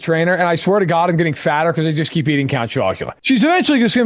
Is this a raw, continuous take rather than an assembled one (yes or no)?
no